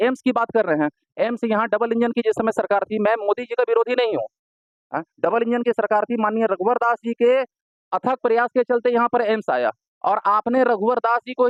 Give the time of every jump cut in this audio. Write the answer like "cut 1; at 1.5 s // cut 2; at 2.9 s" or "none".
none